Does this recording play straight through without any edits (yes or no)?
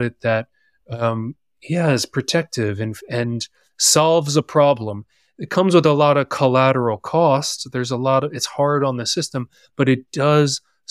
yes